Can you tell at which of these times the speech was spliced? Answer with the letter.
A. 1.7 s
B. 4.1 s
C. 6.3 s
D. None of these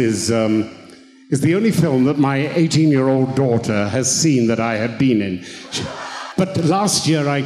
C